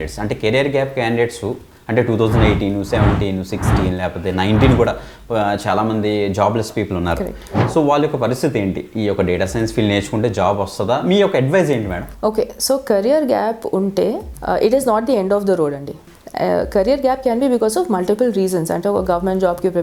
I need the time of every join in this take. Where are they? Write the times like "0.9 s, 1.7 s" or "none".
none